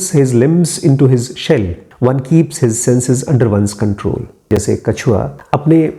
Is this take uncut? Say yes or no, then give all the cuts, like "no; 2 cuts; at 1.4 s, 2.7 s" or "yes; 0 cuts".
no; 1 cut; at 4.6 s